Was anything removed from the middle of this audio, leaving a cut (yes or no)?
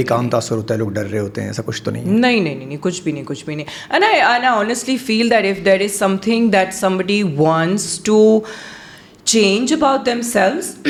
no